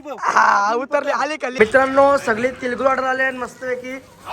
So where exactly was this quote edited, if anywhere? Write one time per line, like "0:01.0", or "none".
0:01.4